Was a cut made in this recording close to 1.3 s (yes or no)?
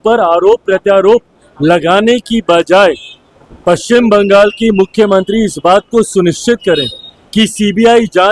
no